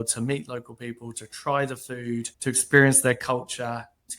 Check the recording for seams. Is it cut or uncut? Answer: cut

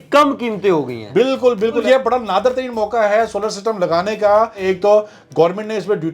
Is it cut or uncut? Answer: cut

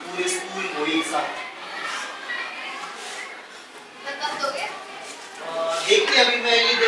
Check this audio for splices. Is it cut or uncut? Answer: uncut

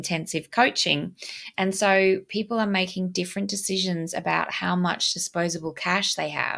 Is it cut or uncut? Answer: uncut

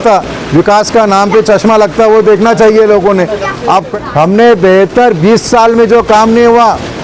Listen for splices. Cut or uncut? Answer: cut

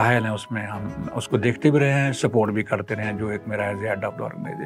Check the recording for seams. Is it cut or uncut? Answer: uncut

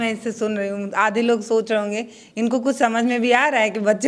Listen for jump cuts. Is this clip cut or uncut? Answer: uncut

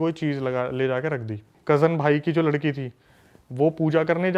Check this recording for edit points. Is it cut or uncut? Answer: cut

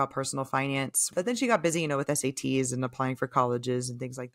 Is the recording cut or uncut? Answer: cut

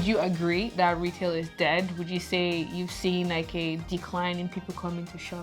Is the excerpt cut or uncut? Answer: uncut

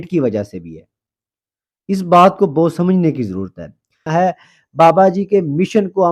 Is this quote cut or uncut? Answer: cut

